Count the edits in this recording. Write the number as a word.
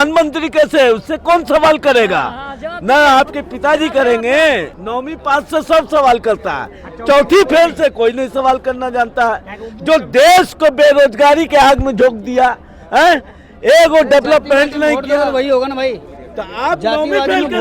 one